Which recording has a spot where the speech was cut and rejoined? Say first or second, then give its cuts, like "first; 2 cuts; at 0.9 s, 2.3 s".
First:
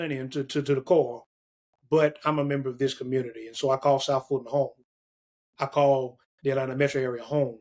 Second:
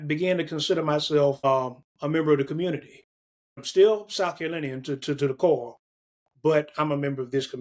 second; 2 cuts; at 1.4 s, 3.6 s